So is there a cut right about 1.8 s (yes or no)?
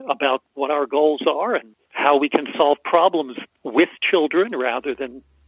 yes